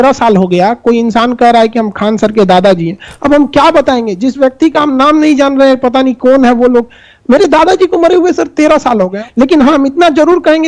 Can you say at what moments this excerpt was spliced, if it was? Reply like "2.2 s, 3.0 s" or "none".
9.2 s